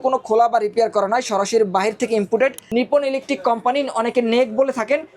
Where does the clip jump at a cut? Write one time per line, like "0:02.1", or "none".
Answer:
0:02.6

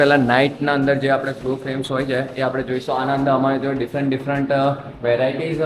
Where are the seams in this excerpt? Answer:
none

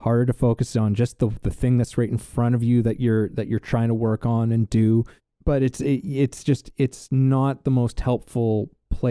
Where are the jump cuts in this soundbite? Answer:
0:05.2

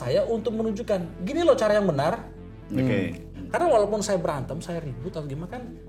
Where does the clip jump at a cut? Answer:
0:03.3

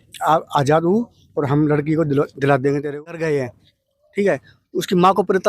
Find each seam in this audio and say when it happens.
0:03.3

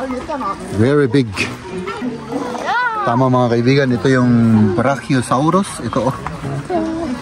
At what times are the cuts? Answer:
0:02.1

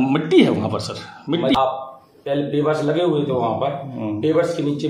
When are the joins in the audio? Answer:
0:01.5

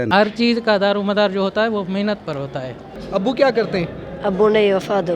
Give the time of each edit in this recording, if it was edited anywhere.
0:03.0

